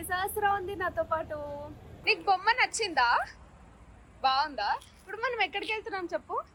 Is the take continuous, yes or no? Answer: yes